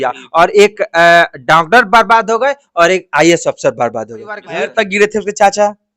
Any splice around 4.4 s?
yes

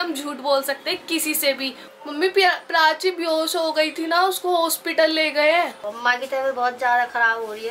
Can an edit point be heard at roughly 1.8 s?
yes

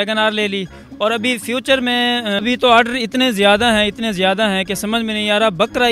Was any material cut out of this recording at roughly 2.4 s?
yes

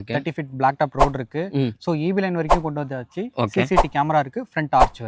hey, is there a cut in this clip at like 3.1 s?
no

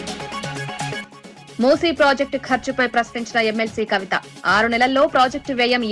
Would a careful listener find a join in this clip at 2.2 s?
no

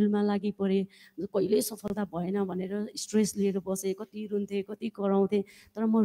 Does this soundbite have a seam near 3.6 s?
no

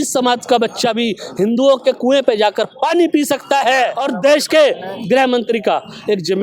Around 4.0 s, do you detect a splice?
yes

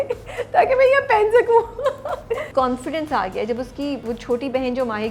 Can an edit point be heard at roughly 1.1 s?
no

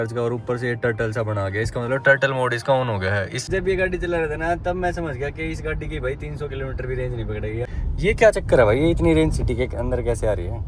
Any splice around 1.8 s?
no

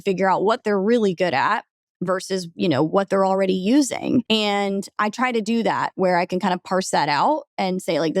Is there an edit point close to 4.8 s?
yes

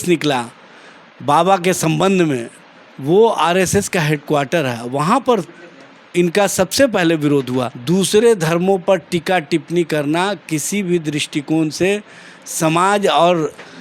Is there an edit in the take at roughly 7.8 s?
yes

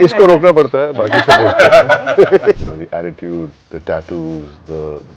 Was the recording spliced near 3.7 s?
yes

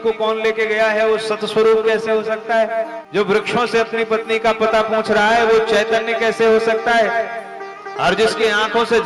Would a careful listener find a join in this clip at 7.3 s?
no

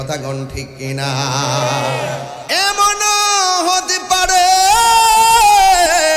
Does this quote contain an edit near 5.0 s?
no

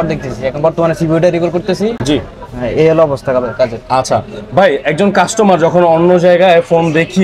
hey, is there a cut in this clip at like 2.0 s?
no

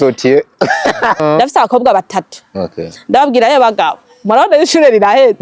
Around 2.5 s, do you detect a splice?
no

